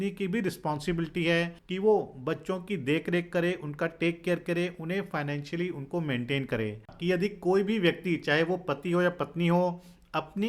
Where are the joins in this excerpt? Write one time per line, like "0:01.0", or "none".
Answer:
0:01.6
0:06.9